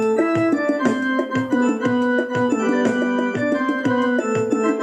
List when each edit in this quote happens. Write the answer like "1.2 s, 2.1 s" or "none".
none